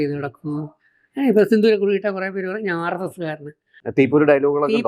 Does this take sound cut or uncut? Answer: cut